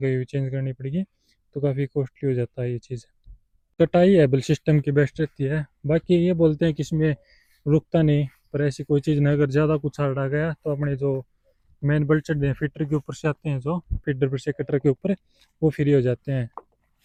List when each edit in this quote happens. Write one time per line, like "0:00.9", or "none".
none